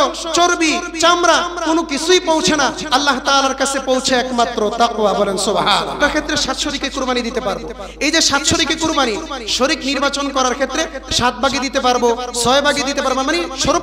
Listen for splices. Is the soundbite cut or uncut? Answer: cut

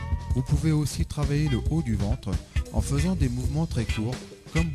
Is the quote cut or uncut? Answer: uncut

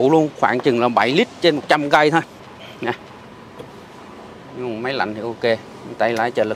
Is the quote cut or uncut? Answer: uncut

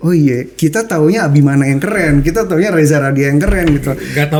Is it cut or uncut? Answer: uncut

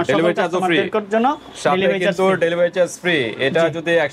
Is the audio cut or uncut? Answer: uncut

